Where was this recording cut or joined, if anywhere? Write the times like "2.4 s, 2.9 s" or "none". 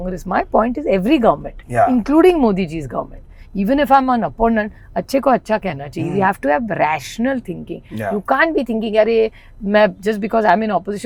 none